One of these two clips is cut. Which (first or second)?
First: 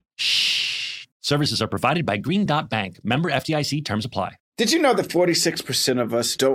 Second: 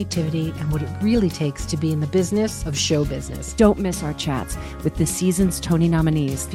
first